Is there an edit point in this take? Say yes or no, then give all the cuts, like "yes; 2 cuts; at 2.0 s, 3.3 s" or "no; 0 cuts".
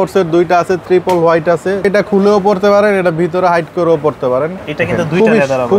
yes; 2 cuts; at 1.8 s, 4.6 s